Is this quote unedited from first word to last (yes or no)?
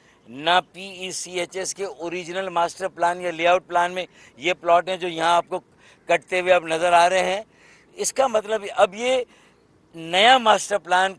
yes